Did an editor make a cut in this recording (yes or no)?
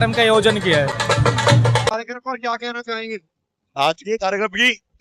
no